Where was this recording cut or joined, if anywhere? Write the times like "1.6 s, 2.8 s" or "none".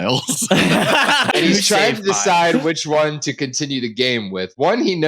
1.3 s